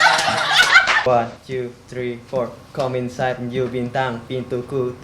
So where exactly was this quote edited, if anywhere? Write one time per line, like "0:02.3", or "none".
0:01.0